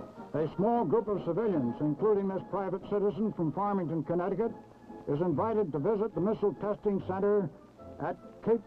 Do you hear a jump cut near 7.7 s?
no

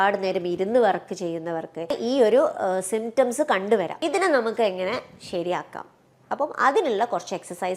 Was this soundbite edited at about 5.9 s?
no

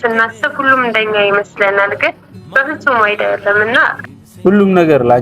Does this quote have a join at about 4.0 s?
yes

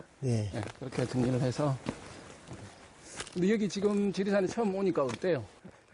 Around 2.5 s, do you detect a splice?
no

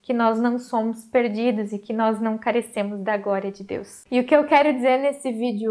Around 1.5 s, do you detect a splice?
no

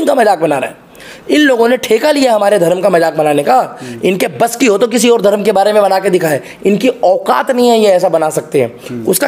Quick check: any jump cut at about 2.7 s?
no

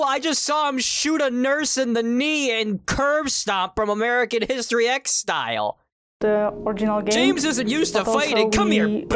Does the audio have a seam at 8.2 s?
no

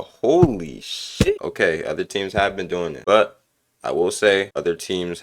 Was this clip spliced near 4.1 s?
no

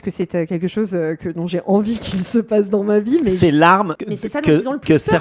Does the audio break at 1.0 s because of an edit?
no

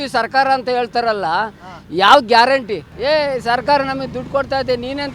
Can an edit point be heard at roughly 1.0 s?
no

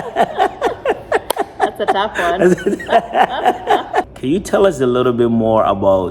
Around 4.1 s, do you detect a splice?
yes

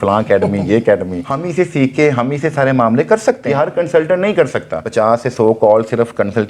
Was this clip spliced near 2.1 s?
no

